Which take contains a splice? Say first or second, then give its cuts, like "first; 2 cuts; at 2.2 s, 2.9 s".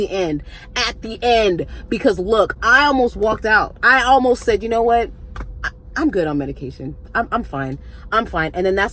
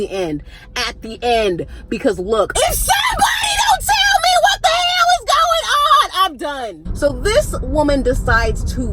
second; 2 cuts; at 2.5 s, 6.8 s